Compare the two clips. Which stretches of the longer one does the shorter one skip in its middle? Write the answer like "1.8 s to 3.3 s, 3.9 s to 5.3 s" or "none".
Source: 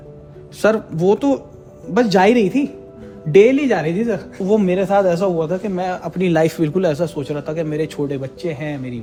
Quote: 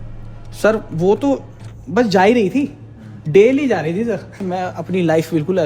4.4 s to 5.6 s